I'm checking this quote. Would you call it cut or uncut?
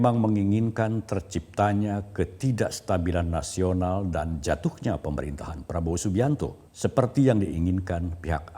cut